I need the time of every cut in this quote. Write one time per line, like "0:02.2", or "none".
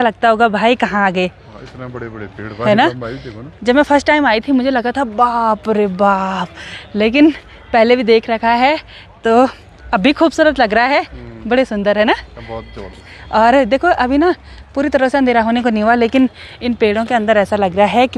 none